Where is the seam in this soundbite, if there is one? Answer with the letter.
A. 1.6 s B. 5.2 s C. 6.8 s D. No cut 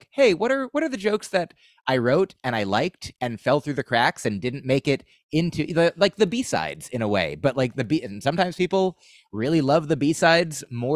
D